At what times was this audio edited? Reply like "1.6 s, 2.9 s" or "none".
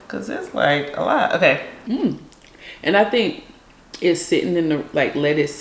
1.7 s